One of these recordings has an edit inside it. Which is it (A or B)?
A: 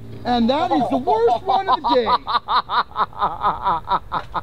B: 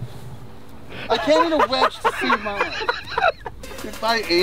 B